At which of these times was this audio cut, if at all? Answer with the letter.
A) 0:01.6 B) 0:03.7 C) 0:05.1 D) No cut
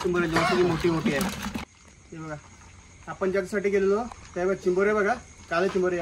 A